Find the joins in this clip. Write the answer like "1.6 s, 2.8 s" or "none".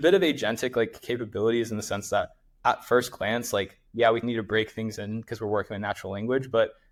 none